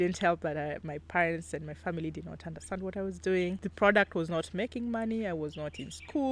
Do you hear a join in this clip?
no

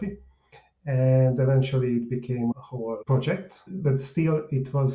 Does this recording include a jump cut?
yes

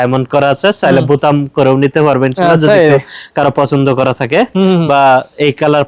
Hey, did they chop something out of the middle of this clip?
no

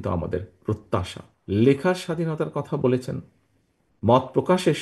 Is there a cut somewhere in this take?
yes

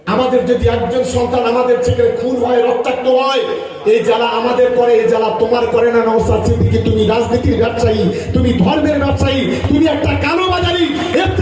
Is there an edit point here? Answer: no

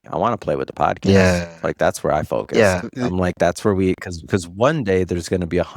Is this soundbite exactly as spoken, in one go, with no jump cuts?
yes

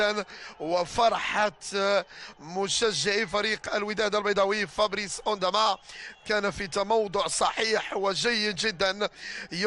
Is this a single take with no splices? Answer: no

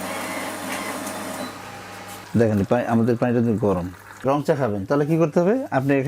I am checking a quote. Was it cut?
yes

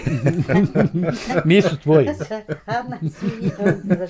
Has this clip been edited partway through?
no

